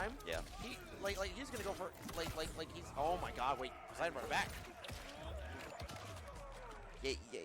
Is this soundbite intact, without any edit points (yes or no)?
no